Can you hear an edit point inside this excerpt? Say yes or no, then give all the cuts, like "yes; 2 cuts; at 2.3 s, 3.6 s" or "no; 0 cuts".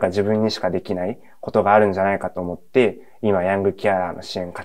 no; 0 cuts